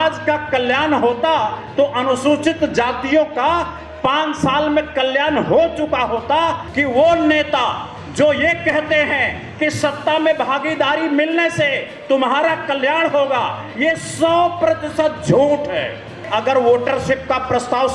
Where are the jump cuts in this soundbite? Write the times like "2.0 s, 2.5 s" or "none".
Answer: 6.6 s, 16.2 s